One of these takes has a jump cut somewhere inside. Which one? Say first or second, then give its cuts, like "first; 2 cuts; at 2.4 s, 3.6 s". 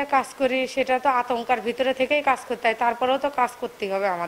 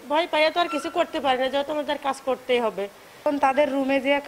second; 1 cut; at 3.2 s